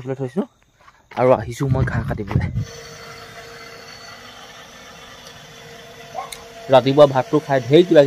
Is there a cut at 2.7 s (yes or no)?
yes